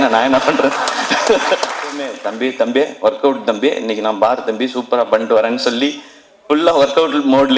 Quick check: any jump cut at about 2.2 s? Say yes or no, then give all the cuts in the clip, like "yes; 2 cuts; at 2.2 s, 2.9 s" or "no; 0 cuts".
yes; 1 cut; at 2.2 s